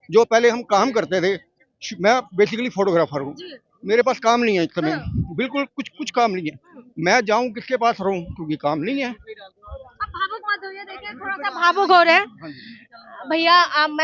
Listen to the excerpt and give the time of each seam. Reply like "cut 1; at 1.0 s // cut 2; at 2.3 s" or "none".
none